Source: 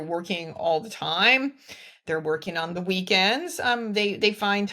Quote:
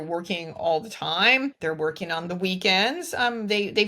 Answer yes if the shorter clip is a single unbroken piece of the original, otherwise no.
no